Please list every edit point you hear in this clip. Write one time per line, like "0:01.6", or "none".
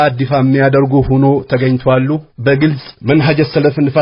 0:02.3